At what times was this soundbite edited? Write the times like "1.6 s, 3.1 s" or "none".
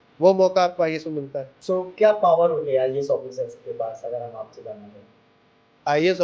1.5 s